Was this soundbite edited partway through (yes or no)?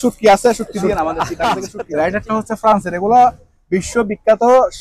yes